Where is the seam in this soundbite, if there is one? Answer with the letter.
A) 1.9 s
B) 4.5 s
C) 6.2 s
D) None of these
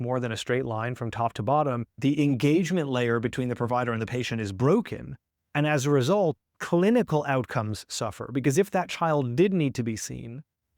A